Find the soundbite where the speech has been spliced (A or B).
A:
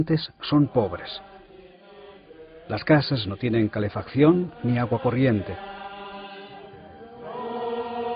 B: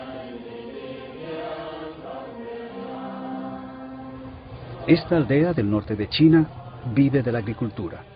A